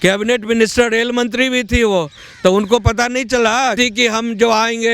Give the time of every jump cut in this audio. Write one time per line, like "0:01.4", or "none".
0:03.7